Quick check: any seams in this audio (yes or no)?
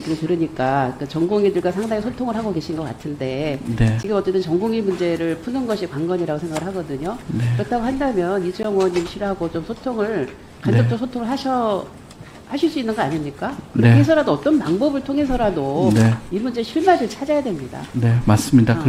no